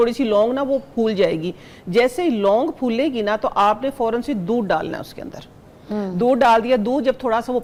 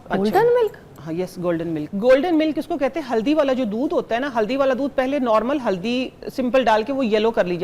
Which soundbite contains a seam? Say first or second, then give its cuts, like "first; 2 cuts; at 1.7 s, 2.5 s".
second; 1 cut; at 1.8 s